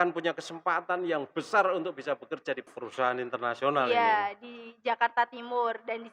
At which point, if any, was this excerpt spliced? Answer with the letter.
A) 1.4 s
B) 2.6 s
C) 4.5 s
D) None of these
B